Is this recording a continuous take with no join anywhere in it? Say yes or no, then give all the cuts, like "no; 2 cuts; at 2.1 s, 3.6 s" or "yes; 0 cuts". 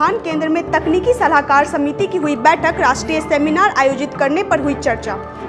yes; 0 cuts